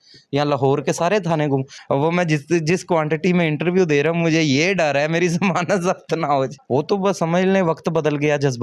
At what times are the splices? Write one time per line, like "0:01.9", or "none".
0:01.8
0:06.6